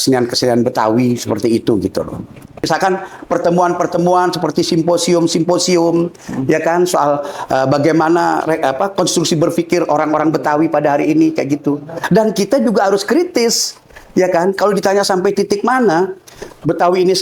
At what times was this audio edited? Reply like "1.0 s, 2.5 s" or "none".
2.7 s, 12.0 s